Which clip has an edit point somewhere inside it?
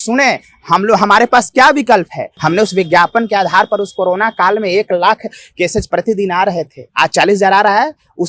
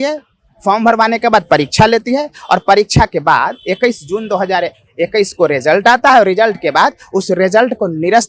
first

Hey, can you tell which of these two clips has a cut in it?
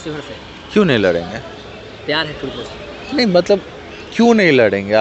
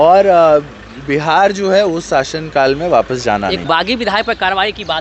second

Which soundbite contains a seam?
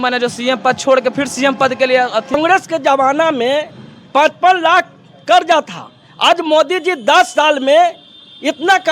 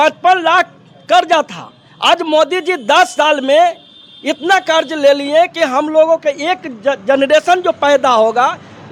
first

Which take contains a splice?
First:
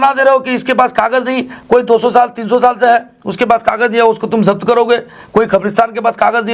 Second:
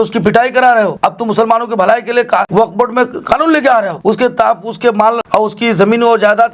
second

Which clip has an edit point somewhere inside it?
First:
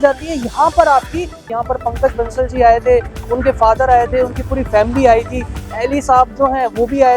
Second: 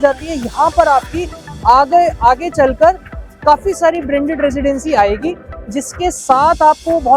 first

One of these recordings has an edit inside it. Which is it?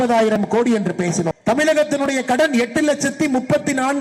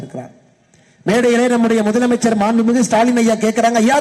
first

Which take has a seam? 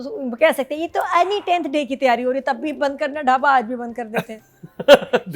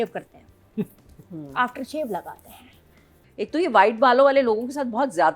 second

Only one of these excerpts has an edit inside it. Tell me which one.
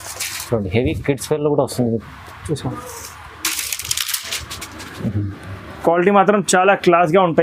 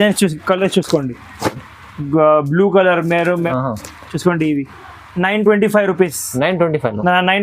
second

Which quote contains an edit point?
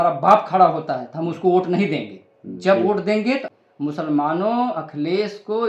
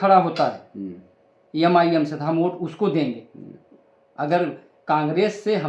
first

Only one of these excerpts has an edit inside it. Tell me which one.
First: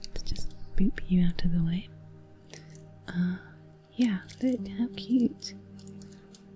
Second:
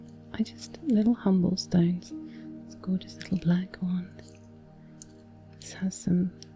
first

